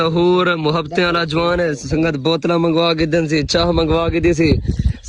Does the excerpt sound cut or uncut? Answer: uncut